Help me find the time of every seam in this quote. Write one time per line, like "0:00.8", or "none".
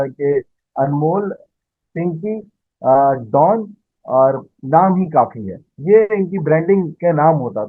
none